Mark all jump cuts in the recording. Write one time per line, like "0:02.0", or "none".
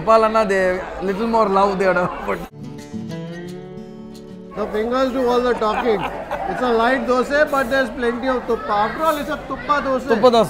none